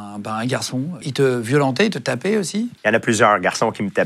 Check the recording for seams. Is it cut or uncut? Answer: cut